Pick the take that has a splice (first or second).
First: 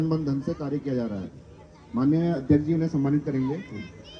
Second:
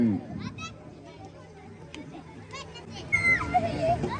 second